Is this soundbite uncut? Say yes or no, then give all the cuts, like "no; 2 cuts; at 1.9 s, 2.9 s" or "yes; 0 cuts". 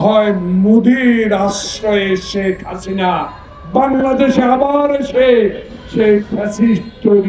yes; 0 cuts